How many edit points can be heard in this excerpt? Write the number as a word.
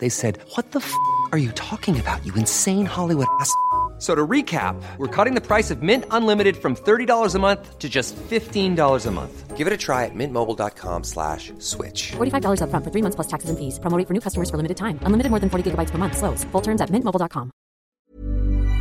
one